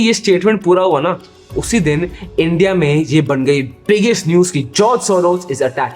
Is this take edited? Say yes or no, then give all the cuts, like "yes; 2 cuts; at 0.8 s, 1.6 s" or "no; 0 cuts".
no; 0 cuts